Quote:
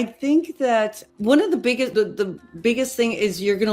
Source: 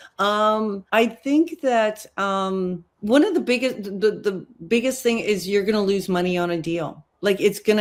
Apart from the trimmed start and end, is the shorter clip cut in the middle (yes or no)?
yes